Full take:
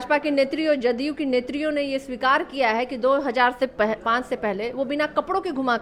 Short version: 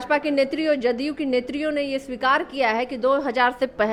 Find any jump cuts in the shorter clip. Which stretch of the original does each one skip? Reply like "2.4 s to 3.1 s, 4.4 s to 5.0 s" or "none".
none